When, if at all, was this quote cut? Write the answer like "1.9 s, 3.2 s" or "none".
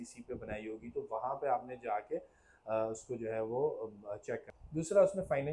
4.6 s